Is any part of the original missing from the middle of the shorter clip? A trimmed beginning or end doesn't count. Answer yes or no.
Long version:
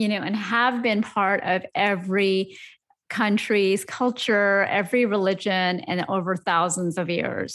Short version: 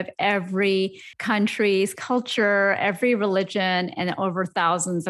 yes